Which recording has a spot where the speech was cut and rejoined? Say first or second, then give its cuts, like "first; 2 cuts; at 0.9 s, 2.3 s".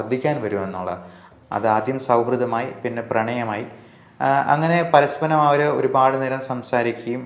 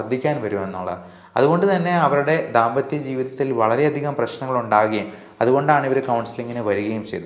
first; 1 cut; at 1.2 s